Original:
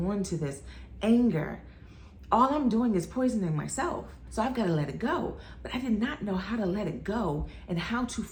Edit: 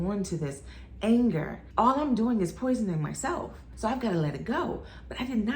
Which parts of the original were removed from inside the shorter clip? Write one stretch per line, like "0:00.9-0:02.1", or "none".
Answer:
0:01.5-0:02.1